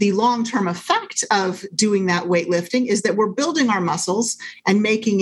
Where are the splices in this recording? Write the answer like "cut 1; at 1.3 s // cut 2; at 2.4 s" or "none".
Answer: none